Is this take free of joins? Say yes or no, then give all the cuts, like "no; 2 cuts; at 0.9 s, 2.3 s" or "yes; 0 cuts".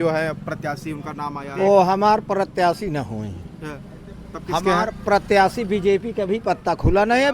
yes; 0 cuts